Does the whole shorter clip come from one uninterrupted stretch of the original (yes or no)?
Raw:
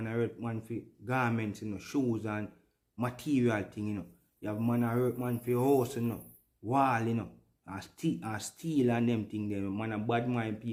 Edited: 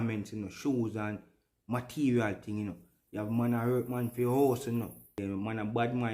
no